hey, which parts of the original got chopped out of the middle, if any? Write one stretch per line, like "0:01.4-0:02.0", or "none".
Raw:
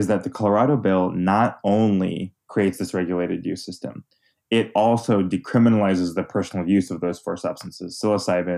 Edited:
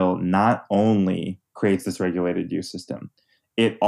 none